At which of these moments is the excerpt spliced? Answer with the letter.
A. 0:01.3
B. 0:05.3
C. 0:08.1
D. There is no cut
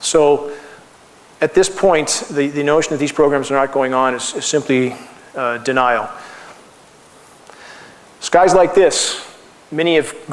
C